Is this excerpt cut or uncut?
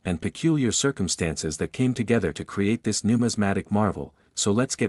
uncut